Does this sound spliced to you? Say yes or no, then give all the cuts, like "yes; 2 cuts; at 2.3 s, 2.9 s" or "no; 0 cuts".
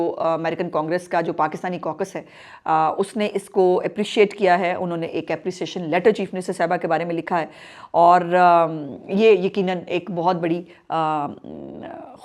no; 0 cuts